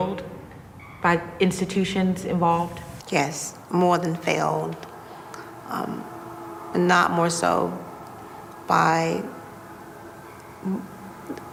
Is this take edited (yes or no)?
no